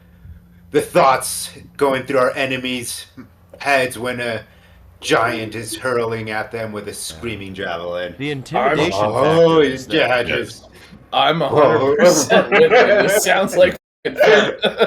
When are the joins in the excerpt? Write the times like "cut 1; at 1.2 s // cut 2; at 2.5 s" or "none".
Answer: none

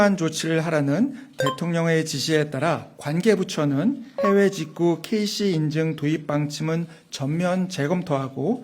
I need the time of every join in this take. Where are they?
cut 1; at 2.9 s // cut 2; at 4.1 s

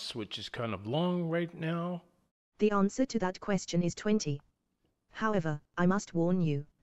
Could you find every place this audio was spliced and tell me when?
cut 1; at 2.2 s

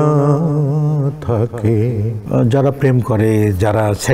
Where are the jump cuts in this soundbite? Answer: cut 1; at 2.1 s

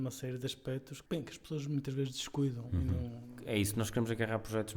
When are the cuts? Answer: cut 1; at 0.9 s // cut 2; at 3.3 s

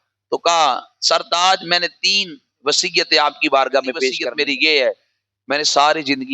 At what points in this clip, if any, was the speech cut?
cut 1; at 4.3 s

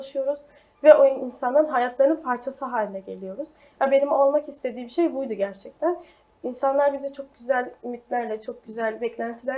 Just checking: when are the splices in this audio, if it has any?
none

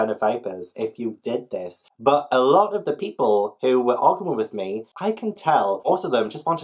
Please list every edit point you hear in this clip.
cut 1; at 1.9 s // cut 2; at 4.9 s

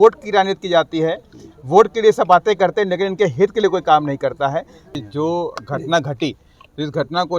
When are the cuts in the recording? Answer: cut 1; at 4.8 s

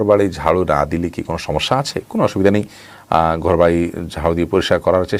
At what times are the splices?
none

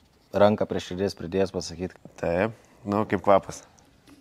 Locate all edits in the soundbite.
cut 1; at 2.0 s

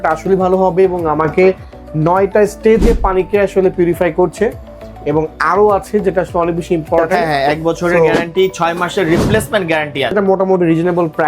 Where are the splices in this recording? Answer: cut 1; at 7.1 s // cut 2; at 10.1 s

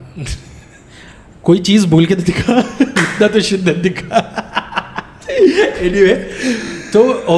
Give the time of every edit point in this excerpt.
none

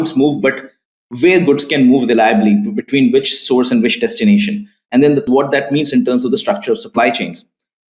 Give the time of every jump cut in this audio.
cut 1; at 5.2 s

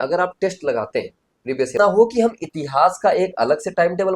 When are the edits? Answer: cut 1; at 1.8 s

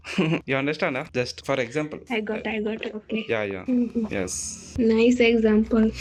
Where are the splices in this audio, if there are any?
none

